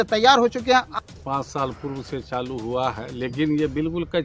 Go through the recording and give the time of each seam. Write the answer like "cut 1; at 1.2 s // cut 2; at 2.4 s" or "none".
cut 1; at 1.0 s